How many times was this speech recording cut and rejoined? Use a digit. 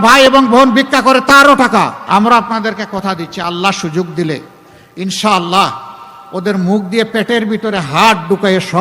1